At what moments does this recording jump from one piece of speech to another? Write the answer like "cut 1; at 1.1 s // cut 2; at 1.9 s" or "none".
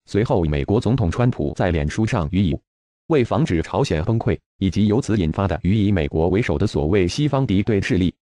none